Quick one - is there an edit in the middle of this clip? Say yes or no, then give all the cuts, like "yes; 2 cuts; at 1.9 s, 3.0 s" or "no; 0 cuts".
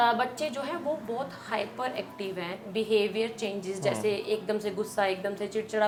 no; 0 cuts